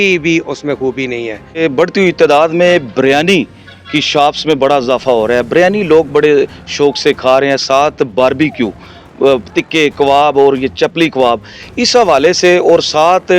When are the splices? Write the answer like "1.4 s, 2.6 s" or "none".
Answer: 1.6 s

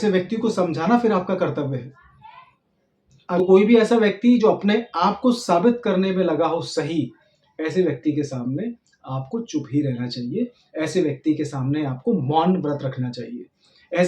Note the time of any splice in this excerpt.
3.4 s

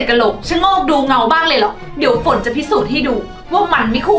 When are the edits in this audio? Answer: 1.8 s

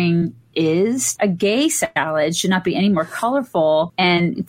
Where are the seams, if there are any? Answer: 1.1 s

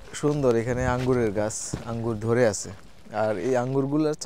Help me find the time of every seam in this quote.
none

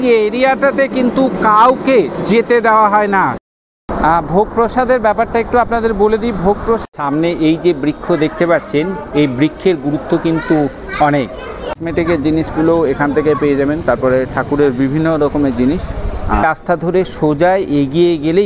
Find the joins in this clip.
3.4 s, 6.9 s, 11.7 s, 16.4 s

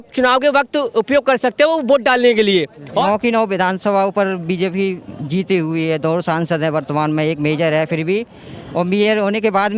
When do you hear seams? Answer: 3.0 s

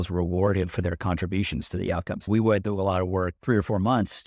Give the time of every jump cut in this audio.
2.3 s, 3.4 s

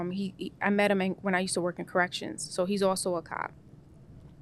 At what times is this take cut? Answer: none

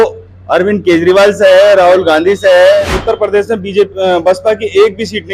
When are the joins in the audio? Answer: 2.9 s

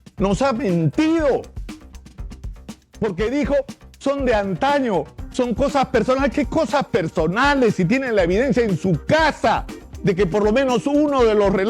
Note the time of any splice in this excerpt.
1.5 s, 3.0 s

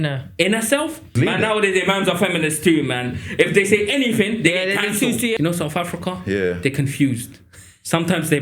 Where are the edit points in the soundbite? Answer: 1.1 s, 5.3 s

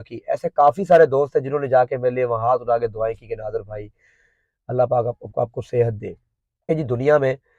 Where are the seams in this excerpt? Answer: 6.6 s

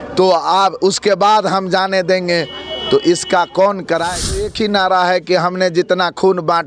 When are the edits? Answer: 4.5 s

